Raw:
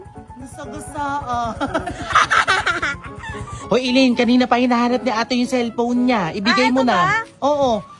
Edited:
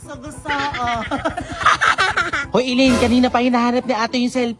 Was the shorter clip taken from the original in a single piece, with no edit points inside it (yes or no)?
no